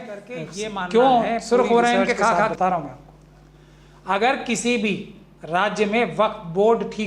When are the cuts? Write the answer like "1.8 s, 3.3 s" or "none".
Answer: 2.5 s